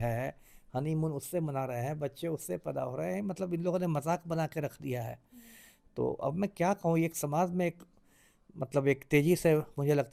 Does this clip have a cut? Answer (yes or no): no